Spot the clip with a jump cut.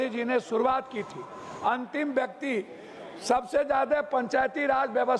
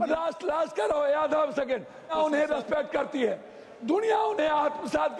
second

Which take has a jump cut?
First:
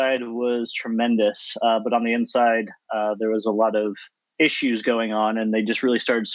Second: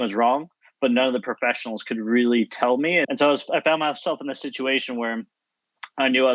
second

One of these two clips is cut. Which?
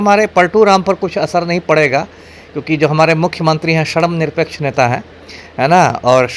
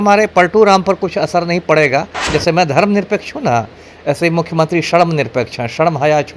second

